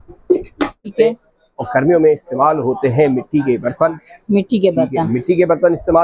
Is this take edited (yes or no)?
yes